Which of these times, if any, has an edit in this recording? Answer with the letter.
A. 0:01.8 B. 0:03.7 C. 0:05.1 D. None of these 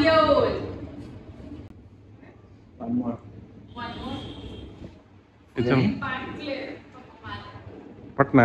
D